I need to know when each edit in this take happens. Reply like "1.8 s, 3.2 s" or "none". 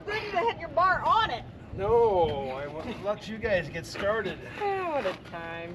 none